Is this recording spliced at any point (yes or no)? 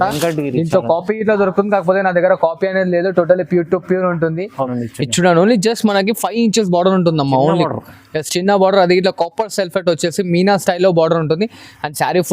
yes